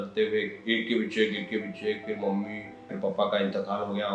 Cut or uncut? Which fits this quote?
cut